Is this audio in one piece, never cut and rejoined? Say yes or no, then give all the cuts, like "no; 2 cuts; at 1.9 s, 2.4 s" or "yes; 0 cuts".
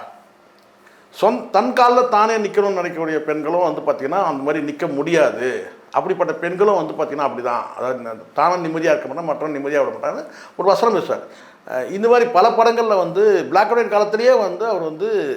no; 1 cut; at 11.4 s